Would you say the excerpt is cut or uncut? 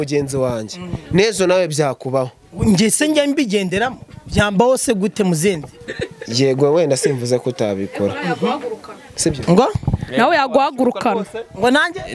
uncut